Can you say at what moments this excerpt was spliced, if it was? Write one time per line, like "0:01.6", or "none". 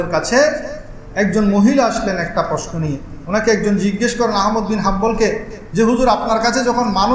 none